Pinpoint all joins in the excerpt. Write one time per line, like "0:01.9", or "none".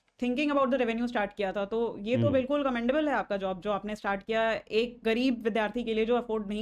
none